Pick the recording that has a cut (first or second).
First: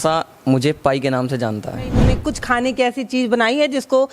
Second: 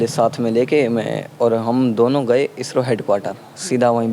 first